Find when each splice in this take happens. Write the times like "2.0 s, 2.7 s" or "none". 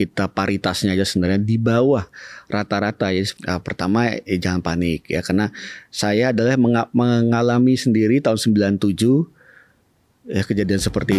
3.3 s